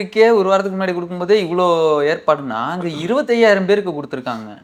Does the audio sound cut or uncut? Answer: uncut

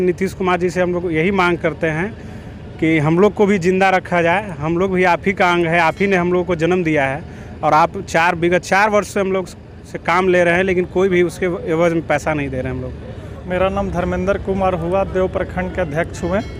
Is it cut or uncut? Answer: uncut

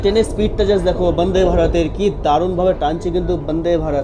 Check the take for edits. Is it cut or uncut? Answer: uncut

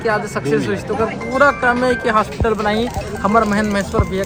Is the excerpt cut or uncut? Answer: uncut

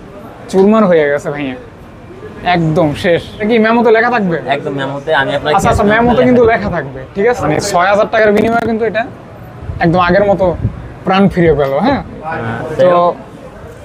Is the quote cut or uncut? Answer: cut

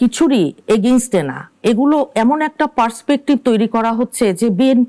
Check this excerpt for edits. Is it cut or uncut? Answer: uncut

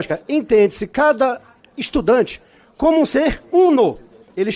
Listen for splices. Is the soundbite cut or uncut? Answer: uncut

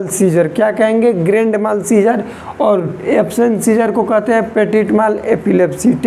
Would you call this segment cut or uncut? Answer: uncut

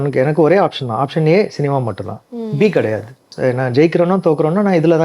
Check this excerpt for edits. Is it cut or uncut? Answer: cut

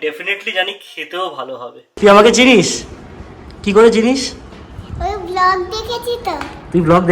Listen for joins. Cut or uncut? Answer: cut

